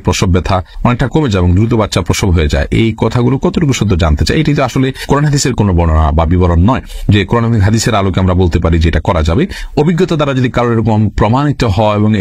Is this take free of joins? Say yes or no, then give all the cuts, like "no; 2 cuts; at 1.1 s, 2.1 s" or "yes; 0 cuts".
yes; 0 cuts